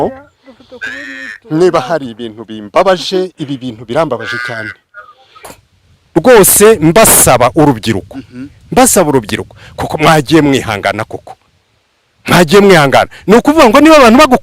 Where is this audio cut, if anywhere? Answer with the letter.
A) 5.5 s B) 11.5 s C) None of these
A